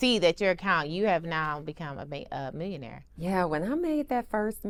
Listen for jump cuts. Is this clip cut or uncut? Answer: uncut